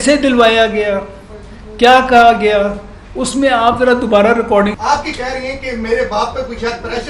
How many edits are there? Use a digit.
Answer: 1